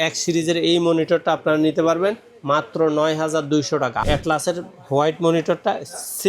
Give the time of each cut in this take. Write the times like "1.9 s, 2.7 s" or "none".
4.0 s